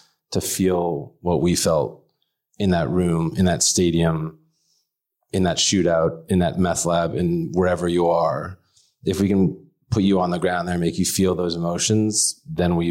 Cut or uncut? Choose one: uncut